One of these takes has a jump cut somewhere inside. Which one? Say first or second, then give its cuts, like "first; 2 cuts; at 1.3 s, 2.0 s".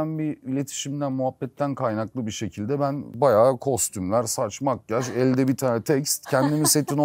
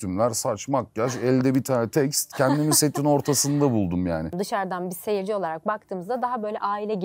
second; 1 cut; at 4.3 s